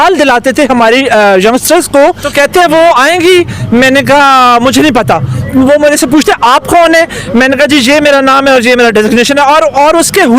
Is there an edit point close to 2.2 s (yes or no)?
yes